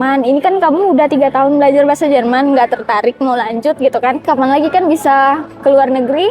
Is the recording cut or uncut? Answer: cut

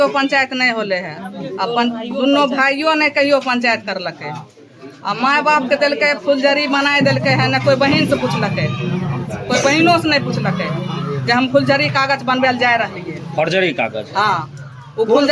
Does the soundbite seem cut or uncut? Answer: uncut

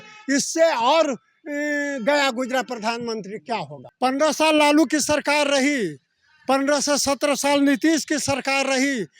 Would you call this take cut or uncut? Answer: cut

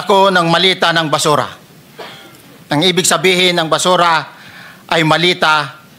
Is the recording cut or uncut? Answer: uncut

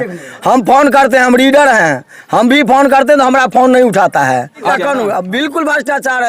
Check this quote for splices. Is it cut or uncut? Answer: cut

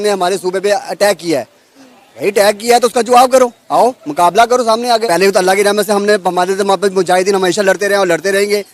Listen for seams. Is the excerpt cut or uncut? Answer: cut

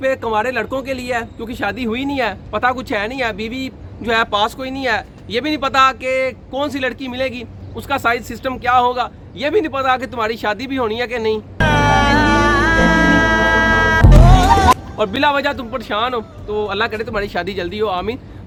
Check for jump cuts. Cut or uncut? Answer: uncut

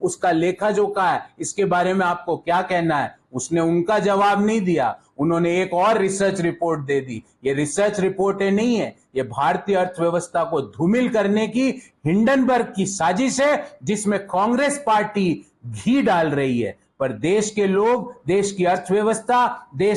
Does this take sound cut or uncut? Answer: uncut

